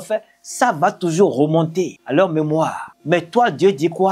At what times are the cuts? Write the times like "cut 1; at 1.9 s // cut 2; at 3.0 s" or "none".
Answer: cut 1; at 2.0 s // cut 2; at 2.9 s